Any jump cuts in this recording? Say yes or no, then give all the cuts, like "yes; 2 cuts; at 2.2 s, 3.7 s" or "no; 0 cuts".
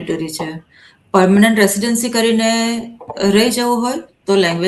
no; 0 cuts